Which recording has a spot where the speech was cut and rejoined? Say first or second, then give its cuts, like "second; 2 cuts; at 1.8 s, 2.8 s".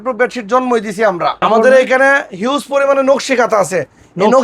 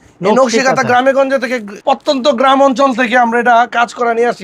first; 1 cut; at 1.4 s